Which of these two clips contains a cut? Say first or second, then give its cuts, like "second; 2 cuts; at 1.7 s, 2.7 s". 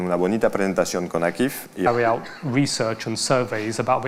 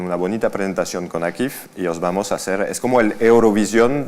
second; 1 cut; at 1.9 s